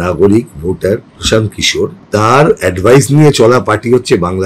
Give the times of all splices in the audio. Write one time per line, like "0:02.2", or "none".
0:02.0